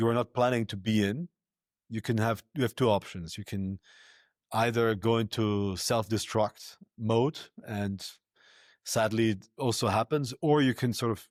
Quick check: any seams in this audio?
no; 0 cuts

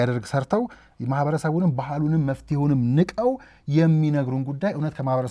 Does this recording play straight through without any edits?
yes; 0 cuts

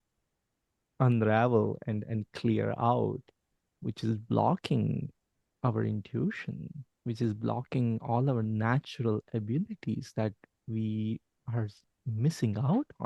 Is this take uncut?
no; 1 cut; at 11.3 s

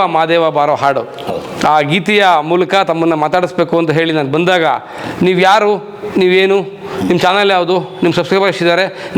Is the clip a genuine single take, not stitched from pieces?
yes; 0 cuts

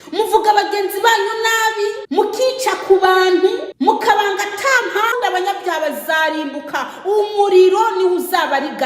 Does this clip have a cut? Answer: yes; 3 cuts; at 2.0 s, 3.7 s, 5.1 s

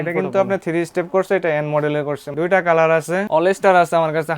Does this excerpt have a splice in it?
yes; 2 cuts; at 2.2 s, 3.2 s

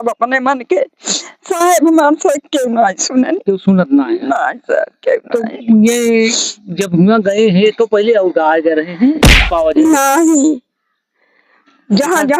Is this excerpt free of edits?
no; 1 cut; at 9.5 s

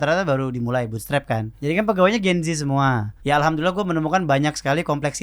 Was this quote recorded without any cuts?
no; 2 cuts; at 1.5 s, 3.1 s

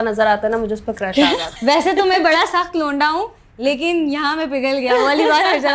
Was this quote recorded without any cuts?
no; 1 cut; at 1.5 s

